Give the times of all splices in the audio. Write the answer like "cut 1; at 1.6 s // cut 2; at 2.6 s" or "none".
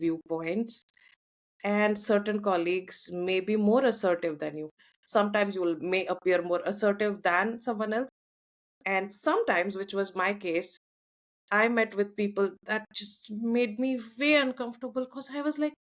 cut 1; at 4.8 s